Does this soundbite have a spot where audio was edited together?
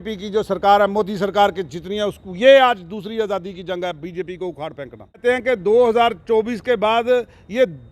yes; 1 cut; at 5.2 s

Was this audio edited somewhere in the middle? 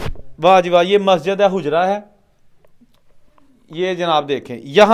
no; 0 cuts

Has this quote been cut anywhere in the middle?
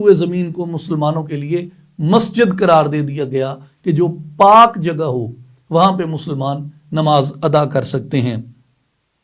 no; 0 cuts

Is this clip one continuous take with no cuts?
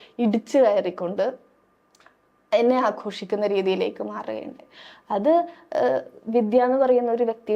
yes; 0 cuts

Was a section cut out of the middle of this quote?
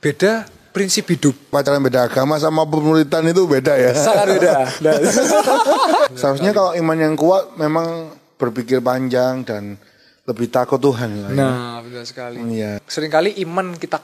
yes; 3 cuts; at 1.6 s, 6.1 s, 12.8 s

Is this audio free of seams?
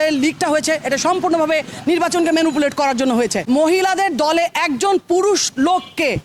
no; 1 cut; at 3.4 s

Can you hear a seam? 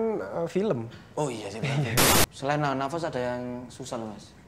yes; 1 cut; at 2.1 s

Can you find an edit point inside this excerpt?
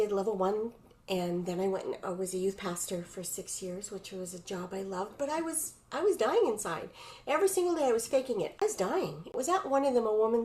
yes; 1 cut; at 8.8 s

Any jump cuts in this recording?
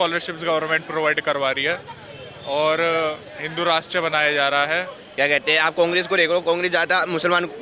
yes; 1 cut; at 5.0 s

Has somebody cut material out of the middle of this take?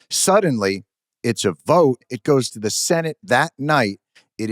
yes; 1 cut; at 2.1 s

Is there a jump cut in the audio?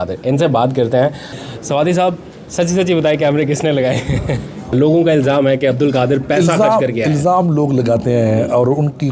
yes; 2 cuts; at 1.3 s, 4.7 s

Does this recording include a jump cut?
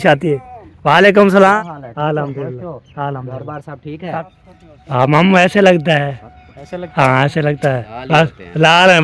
yes; 3 cuts; at 1.5 s, 4.2 s, 7.9 s

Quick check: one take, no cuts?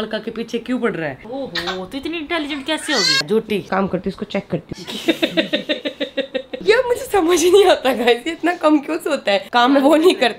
no; 5 cuts; at 1.3 s, 3.6 s, 4.7 s, 6.5 s, 9.5 s

